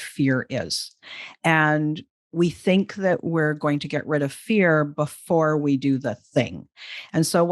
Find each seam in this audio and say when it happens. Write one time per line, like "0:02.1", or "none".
none